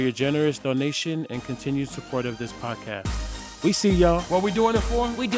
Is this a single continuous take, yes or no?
no